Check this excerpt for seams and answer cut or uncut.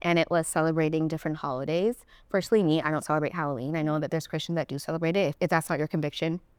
uncut